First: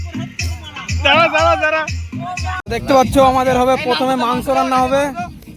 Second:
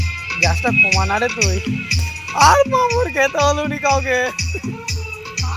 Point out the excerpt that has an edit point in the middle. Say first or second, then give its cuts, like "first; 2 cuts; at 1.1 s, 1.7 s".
first; 1 cut; at 2.5 s